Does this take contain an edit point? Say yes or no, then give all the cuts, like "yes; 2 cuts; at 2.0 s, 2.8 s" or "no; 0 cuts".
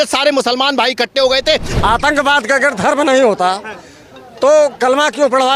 yes; 1 cut; at 1.7 s